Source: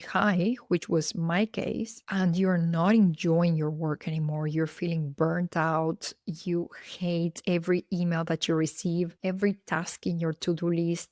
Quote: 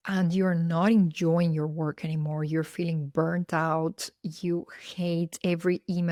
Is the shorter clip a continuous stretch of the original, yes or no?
yes